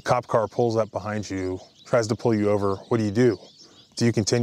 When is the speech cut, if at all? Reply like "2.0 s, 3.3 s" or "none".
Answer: 1.7 s